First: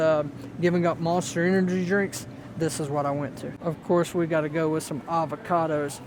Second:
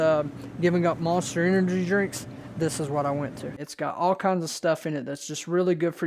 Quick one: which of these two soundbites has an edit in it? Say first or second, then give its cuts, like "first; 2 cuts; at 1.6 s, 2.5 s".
second; 1 cut; at 3.6 s